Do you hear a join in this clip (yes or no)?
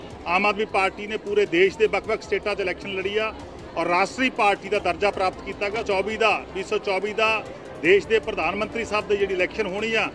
yes